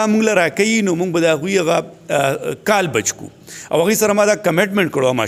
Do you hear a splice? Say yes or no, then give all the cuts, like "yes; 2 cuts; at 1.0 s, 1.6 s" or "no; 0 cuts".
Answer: no; 0 cuts